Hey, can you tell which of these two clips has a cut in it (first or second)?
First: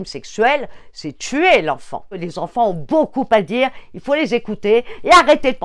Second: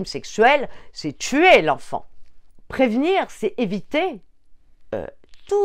first